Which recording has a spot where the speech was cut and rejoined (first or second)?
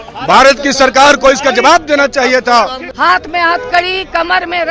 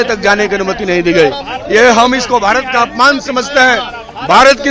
first